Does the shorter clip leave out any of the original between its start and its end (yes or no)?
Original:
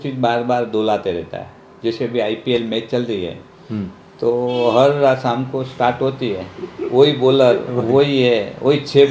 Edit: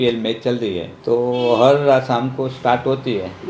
yes